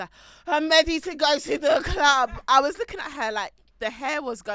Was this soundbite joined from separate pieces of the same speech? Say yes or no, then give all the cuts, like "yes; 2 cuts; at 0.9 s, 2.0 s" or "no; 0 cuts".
no; 0 cuts